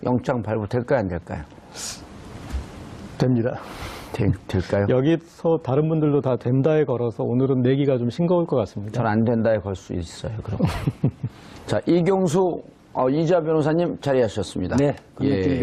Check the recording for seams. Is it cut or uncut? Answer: uncut